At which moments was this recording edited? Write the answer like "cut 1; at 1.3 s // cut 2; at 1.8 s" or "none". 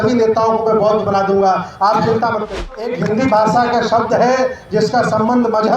cut 1; at 2.9 s